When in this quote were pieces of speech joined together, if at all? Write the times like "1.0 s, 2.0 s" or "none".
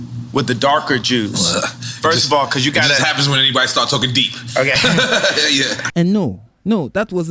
5.8 s